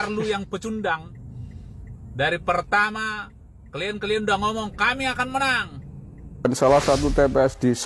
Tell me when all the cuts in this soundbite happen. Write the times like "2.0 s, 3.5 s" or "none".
6.5 s